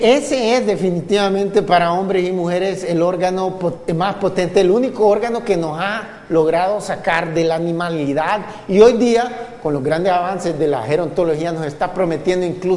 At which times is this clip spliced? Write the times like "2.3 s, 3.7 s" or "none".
4.2 s